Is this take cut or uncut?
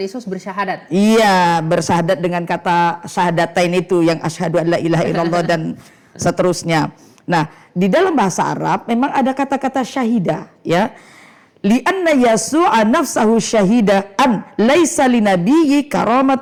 uncut